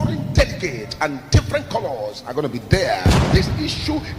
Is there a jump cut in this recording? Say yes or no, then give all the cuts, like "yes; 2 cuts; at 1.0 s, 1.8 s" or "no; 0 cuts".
yes; 1 cut; at 3.2 s